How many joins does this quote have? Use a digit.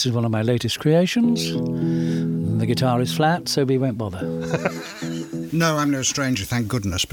1